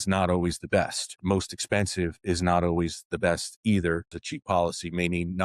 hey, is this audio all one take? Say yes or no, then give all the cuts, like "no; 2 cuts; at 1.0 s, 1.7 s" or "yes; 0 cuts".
no; 2 cuts; at 1.2 s, 4.2 s